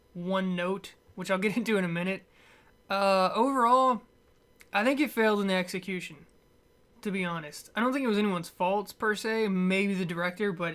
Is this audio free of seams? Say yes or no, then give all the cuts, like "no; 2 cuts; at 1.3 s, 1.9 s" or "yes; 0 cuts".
no; 1 cut; at 2.3 s